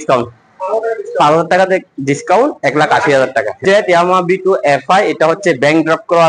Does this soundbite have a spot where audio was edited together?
yes; 1 cut; at 3.6 s

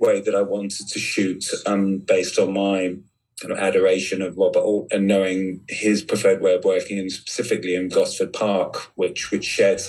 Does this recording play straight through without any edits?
yes; 0 cuts

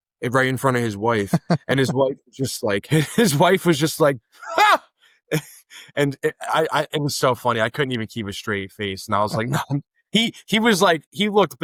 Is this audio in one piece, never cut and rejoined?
yes; 0 cuts

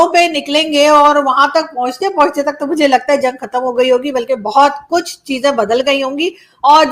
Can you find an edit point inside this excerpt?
no; 0 cuts

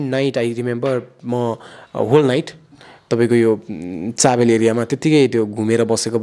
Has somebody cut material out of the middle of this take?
no; 0 cuts

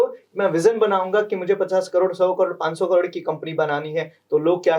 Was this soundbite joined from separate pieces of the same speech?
no; 0 cuts

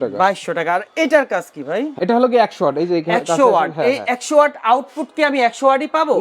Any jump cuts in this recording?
yes; 1 cut; at 1.9 s

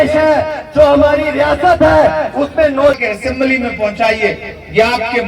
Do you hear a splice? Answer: yes; 1 cut; at 3.0 s

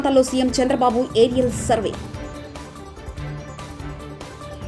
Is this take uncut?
yes; 0 cuts

